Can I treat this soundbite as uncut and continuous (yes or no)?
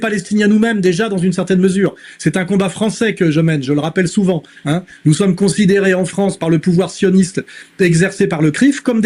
yes